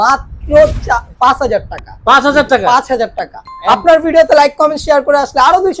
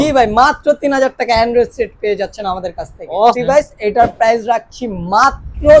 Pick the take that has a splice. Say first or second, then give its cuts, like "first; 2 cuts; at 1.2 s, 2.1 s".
second; 1 cut; at 3.4 s